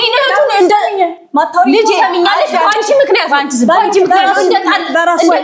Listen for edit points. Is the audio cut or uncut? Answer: uncut